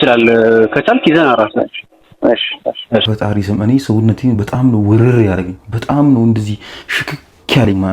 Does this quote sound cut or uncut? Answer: cut